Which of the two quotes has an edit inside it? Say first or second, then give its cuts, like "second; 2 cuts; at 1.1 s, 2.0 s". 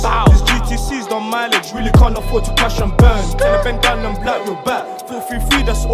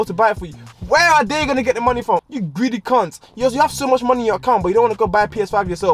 second; 1 cut; at 2.2 s